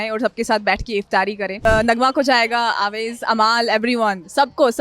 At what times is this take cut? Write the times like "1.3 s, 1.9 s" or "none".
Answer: 1.6 s